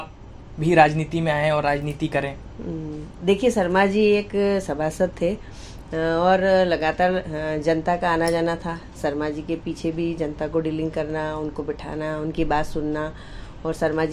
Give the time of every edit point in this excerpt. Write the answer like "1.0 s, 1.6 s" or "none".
none